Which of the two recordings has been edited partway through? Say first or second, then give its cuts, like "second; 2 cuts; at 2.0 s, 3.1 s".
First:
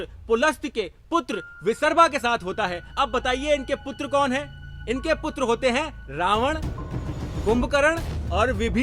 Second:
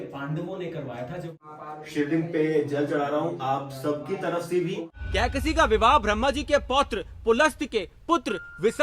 second; 2 cuts; at 1.4 s, 4.9 s